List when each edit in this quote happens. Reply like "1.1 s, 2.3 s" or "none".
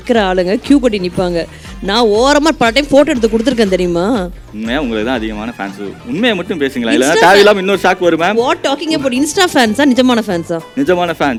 none